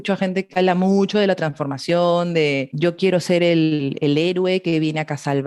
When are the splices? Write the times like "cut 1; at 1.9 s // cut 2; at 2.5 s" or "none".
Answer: cut 1; at 2.7 s